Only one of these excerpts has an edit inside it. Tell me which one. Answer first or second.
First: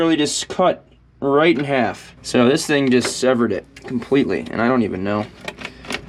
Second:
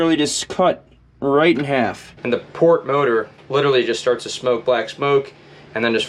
second